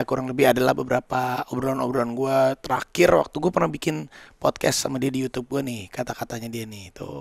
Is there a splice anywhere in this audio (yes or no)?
no